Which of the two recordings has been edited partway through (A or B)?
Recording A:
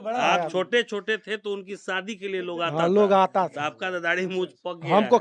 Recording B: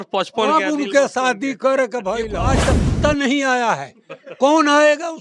B